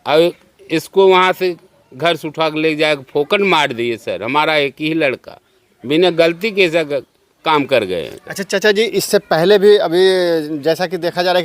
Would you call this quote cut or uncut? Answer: uncut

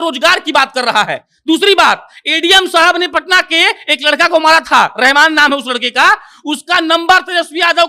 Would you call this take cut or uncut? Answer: uncut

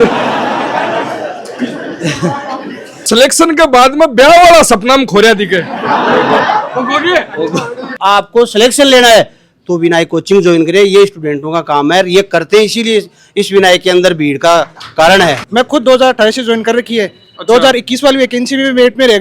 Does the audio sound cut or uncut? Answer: cut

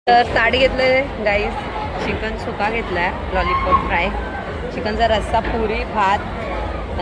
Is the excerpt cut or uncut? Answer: uncut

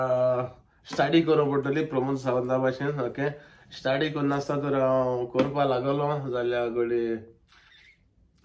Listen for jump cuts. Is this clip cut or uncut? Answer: uncut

